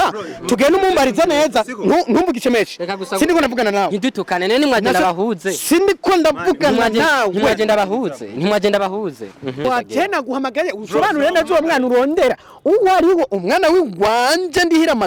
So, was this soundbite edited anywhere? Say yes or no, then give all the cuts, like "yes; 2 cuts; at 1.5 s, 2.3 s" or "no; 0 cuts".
yes; 1 cut; at 9.6 s